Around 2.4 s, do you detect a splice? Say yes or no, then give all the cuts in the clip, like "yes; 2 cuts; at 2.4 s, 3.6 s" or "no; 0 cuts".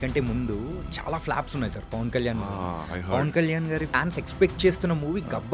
no; 1 cut; at 3.9 s